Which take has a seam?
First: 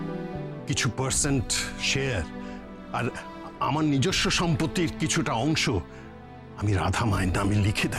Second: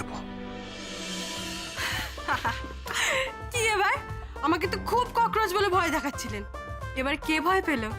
second; 1 cut; at 1.6 s

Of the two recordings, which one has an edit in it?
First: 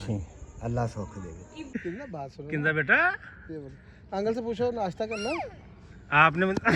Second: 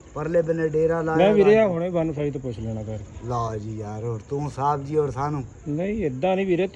first; 1 cut; at 1.6 s

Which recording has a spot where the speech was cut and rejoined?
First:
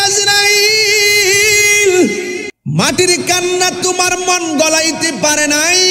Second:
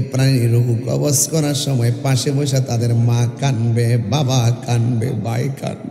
first; 1 cut; at 2.5 s

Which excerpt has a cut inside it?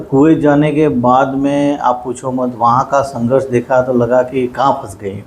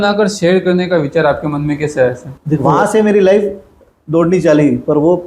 second; 1 cut; at 2.7 s

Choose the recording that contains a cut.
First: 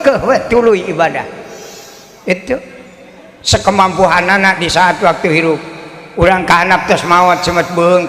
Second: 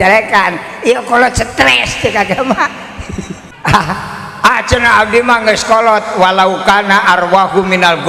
second; 1 cut; at 3.4 s

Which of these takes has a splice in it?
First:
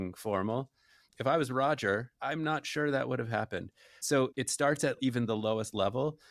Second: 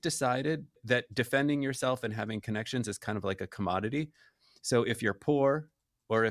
first; 3 cuts; at 1.2 s, 2.1 s, 4.1 s

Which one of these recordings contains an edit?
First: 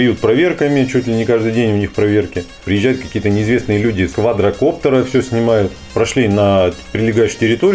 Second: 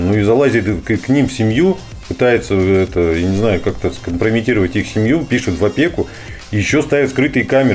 first; 3 cuts; at 2.6 s, 4.1 s, 5.8 s

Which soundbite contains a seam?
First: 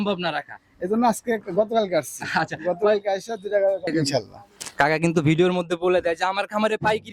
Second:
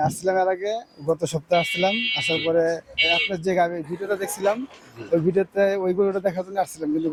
first; 1 cut; at 3.9 s

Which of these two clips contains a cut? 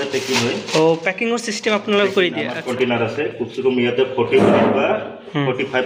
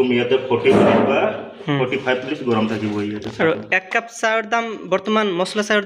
first; 1 cut; at 2.6 s

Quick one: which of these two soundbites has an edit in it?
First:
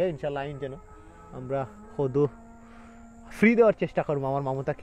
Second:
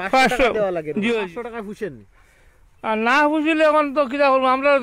second; 1 cut; at 1.2 s

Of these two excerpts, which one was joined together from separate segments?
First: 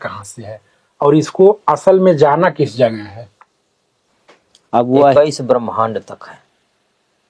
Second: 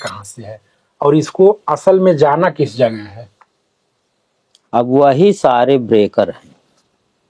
first; 1 cut; at 5.1 s

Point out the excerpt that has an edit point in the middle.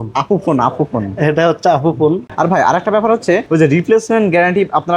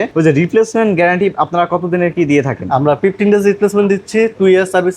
first; 1 cut; at 2.3 s

